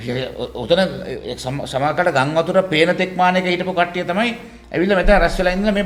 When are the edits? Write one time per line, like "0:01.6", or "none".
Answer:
none